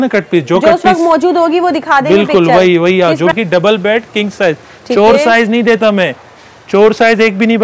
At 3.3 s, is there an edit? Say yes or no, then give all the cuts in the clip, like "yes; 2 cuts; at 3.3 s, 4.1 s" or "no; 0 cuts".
yes; 1 cut; at 3.3 s